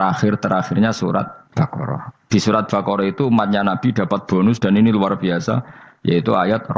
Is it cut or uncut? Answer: cut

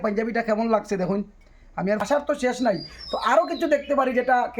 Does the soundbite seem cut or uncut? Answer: cut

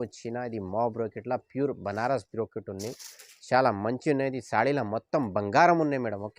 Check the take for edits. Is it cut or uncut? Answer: uncut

